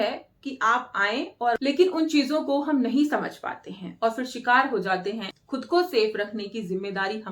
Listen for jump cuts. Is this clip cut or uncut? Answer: cut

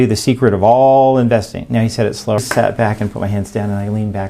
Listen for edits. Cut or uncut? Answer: cut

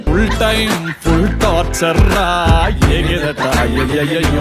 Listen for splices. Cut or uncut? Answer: uncut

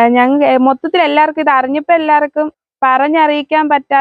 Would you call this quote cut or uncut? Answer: cut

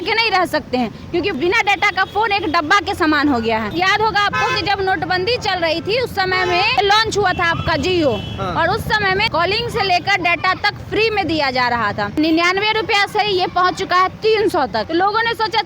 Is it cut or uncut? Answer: cut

